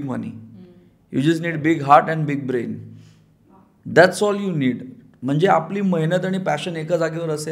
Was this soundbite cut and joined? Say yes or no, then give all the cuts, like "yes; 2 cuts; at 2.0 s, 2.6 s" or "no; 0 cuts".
no; 0 cuts